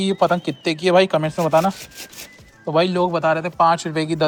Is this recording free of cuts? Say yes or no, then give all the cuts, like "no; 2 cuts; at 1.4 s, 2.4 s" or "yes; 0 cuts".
yes; 0 cuts